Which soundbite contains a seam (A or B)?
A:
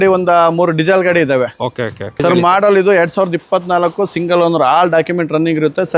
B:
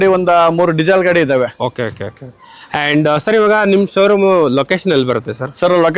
A